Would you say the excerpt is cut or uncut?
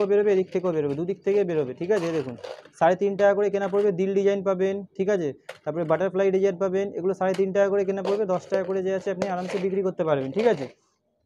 uncut